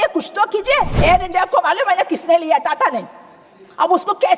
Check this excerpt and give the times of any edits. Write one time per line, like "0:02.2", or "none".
0:00.9

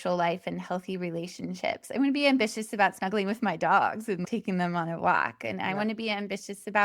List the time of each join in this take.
0:04.2

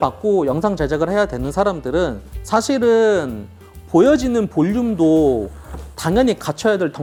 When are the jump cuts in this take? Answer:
none

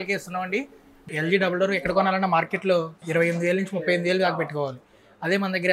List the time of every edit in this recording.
0:01.1
0:03.0

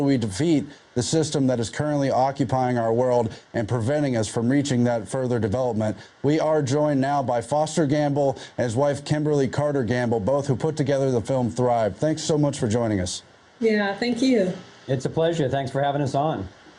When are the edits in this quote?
none

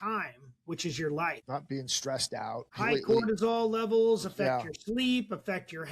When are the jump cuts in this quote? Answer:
0:01.4
0:02.7

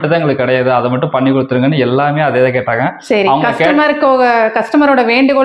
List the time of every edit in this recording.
none

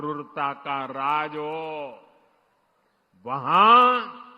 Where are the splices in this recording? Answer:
none

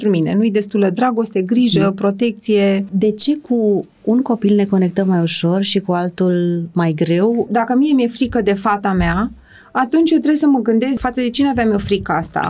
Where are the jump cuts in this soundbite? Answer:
0:02.9
0:07.5
0:11.0

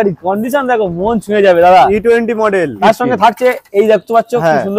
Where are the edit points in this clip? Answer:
0:02.8

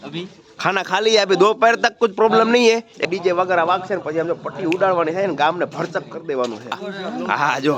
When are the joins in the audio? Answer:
0:03.0
0:06.8

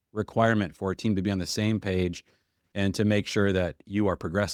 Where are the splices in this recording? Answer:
none

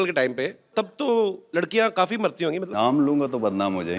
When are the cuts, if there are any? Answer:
0:00.7
0:01.4
0:02.7

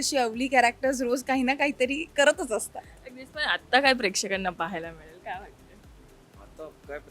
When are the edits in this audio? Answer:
none

